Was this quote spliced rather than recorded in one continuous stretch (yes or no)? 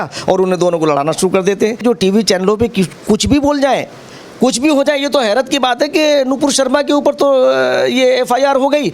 yes